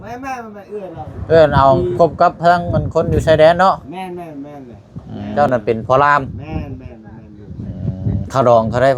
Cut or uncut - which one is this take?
cut